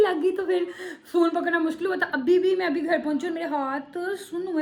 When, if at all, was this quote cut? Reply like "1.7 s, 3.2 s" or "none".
none